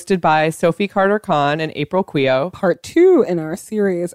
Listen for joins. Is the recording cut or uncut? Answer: cut